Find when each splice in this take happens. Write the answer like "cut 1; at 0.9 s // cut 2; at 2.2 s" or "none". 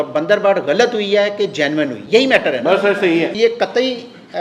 cut 1; at 2.0 s // cut 2; at 3.4 s